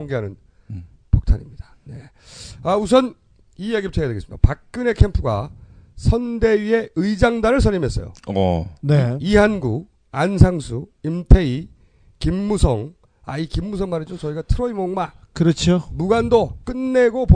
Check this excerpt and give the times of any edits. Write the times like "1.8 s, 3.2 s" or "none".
none